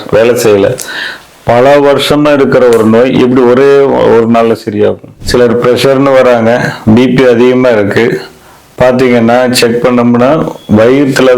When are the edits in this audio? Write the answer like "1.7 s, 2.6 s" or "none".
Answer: 5.1 s